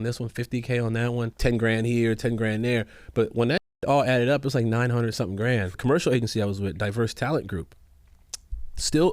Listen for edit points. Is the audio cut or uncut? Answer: cut